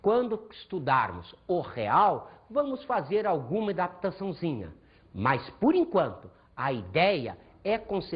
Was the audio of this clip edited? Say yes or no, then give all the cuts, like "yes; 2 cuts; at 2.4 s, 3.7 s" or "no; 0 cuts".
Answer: no; 0 cuts